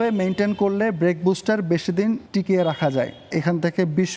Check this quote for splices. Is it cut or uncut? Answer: cut